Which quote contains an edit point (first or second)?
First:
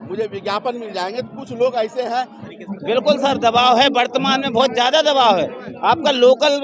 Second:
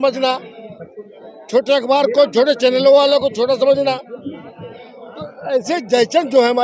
first